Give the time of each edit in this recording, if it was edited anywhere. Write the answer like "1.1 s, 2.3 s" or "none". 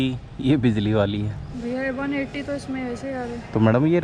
1.5 s